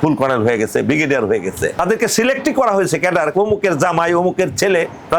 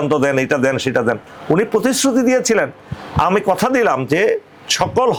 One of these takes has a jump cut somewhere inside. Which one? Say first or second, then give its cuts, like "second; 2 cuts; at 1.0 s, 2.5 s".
first; 1 cut; at 1.8 s